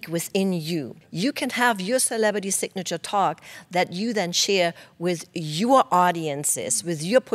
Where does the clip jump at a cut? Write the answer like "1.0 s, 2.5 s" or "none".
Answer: 1.0 s